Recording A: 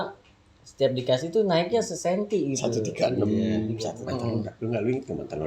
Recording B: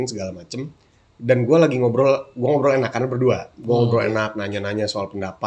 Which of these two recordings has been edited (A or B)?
A